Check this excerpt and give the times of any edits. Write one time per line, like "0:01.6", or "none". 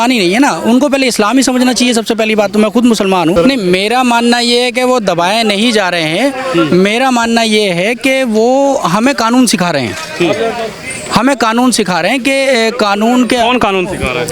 0:03.3